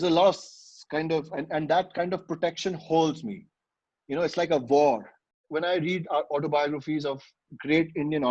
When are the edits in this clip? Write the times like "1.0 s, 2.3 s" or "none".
5.4 s